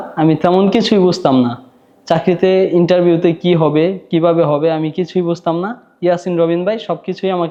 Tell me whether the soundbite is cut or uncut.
uncut